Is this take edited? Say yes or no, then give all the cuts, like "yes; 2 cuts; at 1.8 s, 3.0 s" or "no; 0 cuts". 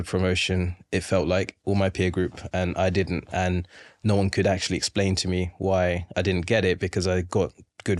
no; 0 cuts